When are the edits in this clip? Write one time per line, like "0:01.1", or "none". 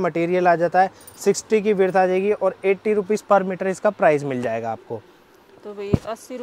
none

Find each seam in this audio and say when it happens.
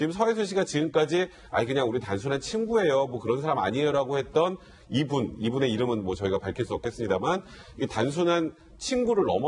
0:05.9

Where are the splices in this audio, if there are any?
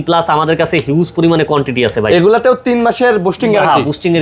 none

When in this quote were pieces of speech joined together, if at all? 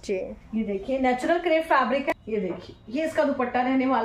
0:02.1

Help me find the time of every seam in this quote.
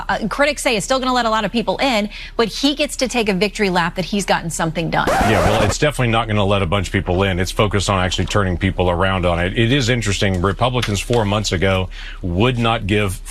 0:05.2

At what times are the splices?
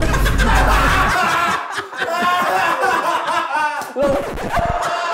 none

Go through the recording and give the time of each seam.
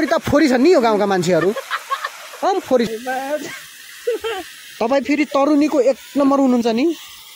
0:02.9

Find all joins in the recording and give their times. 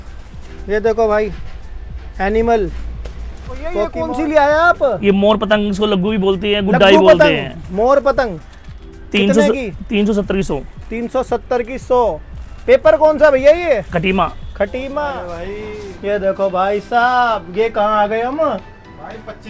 0:04.0
0:15.1

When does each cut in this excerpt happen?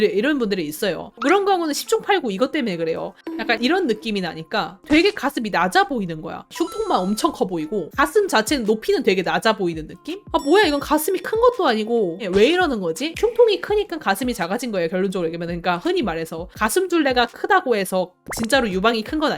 0:03.2
0:13.1

